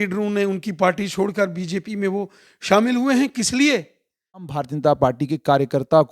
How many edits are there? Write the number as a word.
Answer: one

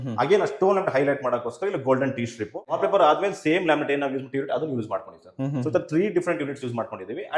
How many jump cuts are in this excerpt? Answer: one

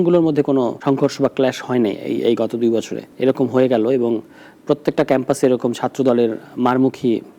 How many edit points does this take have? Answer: two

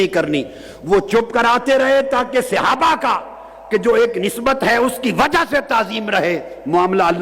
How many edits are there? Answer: zero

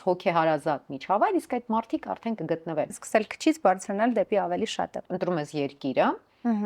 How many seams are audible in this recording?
two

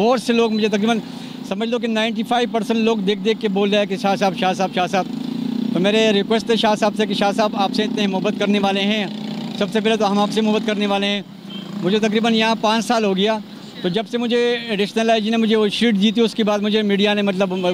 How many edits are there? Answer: zero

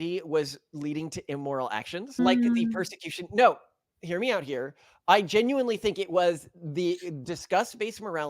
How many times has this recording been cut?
one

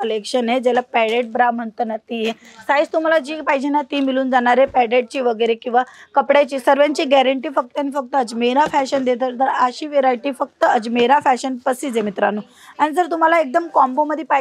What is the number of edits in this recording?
zero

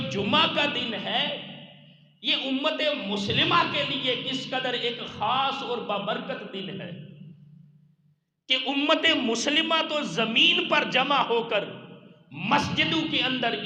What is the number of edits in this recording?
zero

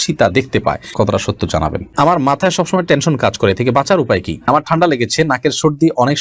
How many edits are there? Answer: three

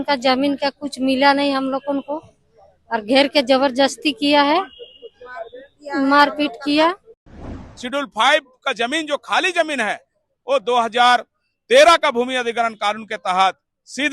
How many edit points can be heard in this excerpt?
one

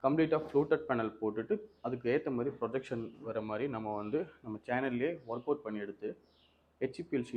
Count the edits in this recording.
zero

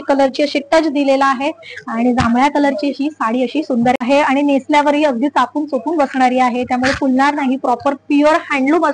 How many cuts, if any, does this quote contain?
one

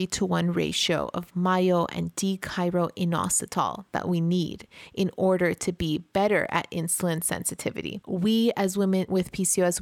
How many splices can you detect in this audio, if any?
two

